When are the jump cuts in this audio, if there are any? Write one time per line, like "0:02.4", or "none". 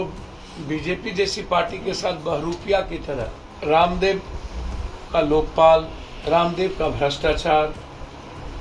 0:03.4